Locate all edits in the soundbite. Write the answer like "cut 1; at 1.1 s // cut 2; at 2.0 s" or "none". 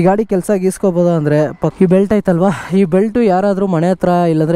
cut 1; at 1.7 s